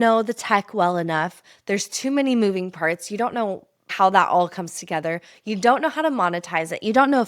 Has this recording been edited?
yes; 1 cut; at 3.9 s

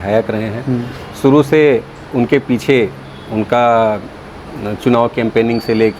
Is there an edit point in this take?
no; 0 cuts

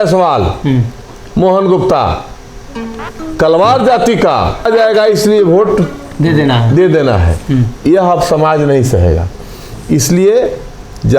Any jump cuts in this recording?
yes; 1 cut; at 4.6 s

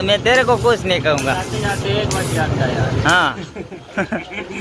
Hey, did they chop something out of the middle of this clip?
no; 0 cuts

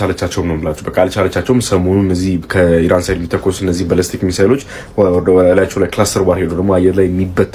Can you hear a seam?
no; 0 cuts

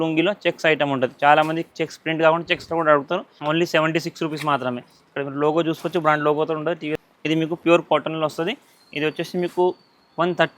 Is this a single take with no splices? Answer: no; 2 cuts; at 3.3 s, 7.0 s

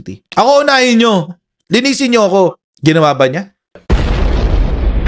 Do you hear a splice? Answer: yes; 1 cut; at 2.7 s

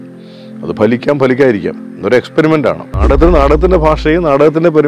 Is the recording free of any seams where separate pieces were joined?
no; 1 cut; at 2.9 s

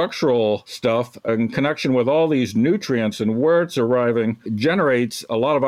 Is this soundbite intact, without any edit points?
no; 2 cuts; at 1.1 s, 4.4 s

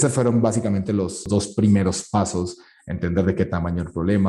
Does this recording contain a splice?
yes; 1 cut; at 1.3 s

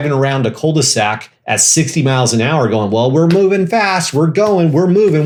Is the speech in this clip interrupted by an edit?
no; 0 cuts

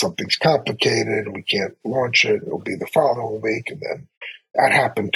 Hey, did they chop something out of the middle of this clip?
no; 0 cuts

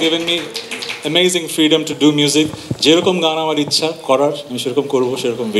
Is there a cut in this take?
yes; 1 cut; at 4.5 s

